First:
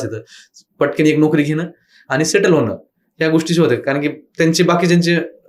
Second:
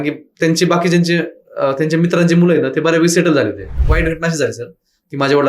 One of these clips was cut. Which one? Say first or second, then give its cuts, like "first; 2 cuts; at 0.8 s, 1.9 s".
second; 1 cut; at 3.8 s